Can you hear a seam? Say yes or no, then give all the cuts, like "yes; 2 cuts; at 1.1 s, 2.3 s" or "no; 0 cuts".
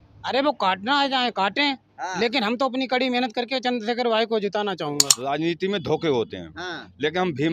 yes; 1 cut; at 5.1 s